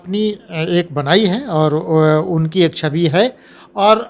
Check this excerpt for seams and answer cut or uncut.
uncut